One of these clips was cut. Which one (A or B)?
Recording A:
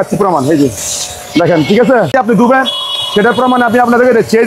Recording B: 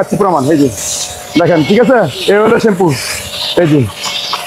A